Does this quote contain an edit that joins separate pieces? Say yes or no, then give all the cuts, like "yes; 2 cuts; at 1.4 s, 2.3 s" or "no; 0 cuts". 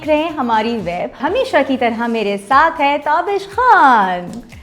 yes; 1 cut; at 1.2 s